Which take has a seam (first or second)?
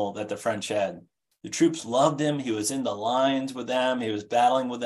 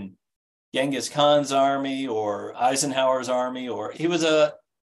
second